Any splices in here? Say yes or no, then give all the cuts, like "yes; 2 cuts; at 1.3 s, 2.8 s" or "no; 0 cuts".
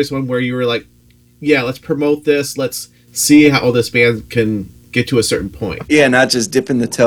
yes; 1 cut; at 5.8 s